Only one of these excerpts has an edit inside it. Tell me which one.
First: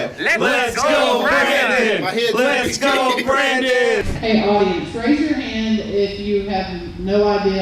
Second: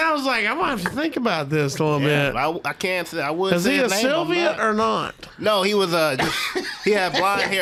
first; 1 cut; at 4.0 s

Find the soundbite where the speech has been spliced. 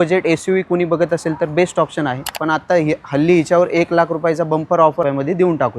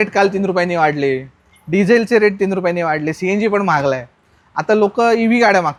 first; 2 cuts; at 2.3 s, 5.0 s

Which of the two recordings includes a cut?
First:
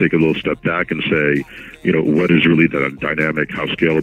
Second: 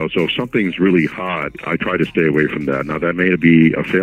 second; 1 cut; at 1.5 s

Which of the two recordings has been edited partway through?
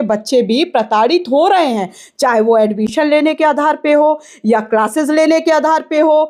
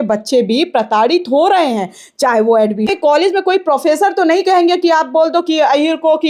second; 1 cut; at 2.9 s

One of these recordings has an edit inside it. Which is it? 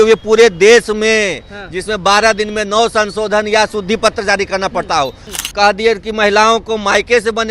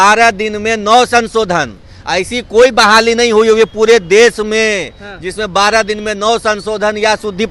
first; 1 cut; at 5.2 s

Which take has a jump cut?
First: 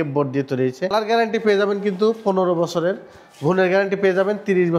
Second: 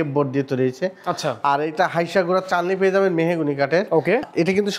first; 1 cut; at 0.9 s

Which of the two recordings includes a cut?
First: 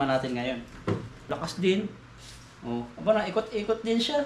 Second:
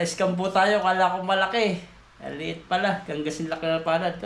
first; 1 cut; at 1.3 s

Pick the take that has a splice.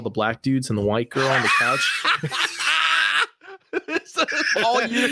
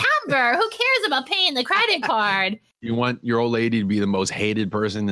second; 1 cut; at 2.7 s

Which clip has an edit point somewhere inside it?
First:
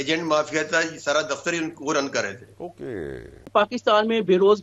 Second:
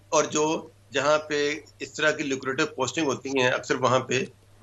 first; 1 cut; at 3.5 s

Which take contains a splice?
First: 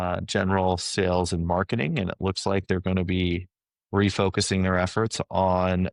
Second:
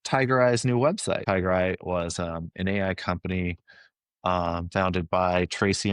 second; 1 cut; at 1.2 s

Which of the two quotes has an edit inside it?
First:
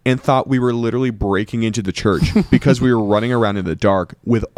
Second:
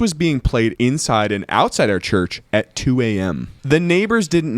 second; 3 cuts; at 0.7 s, 2.4 s, 3.5 s

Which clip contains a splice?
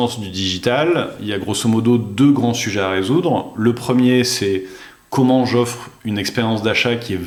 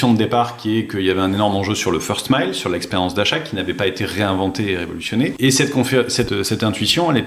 second; 2 cuts; at 5.4 s, 6.3 s

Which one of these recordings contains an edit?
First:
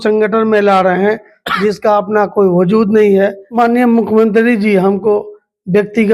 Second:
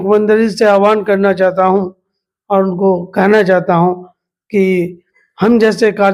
first; 1 cut; at 3.4 s

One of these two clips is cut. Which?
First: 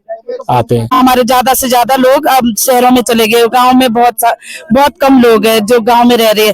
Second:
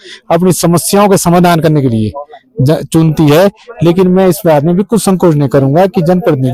first; 1 cut; at 0.9 s

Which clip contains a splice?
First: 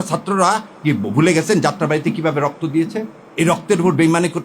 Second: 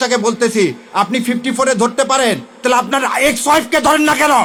first; 1 cut; at 3.2 s

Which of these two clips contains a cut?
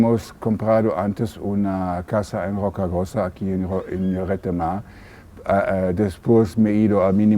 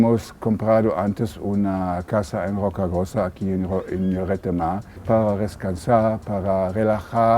second; 1 cut; at 5.0 s

